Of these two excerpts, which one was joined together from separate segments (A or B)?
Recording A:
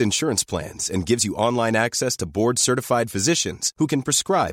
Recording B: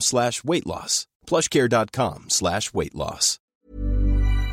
B